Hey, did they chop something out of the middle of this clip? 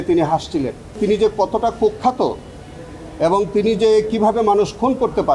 yes; 1 cut; at 1.0 s

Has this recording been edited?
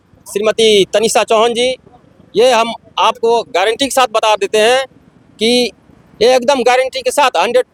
no; 0 cuts

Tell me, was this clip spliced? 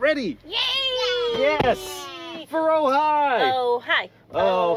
no; 0 cuts

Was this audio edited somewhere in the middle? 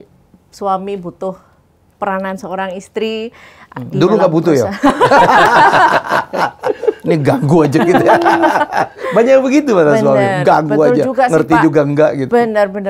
no; 0 cuts

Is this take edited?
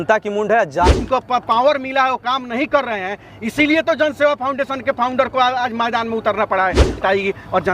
yes; 2 cuts; at 1.0 s, 7.0 s

